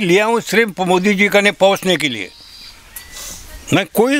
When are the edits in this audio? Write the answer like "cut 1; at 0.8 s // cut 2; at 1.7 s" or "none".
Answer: none